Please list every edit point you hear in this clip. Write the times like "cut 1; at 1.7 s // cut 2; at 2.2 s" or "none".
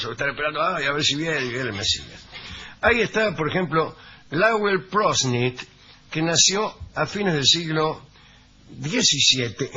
cut 1; at 1.7 s